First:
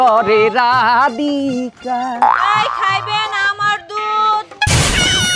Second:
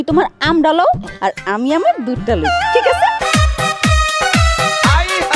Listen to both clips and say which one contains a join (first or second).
second